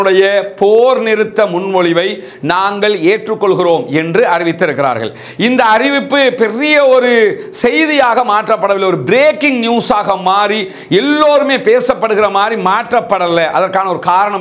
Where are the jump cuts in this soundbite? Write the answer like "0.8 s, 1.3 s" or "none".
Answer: none